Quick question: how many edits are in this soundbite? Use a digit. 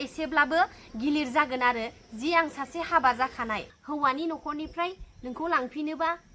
1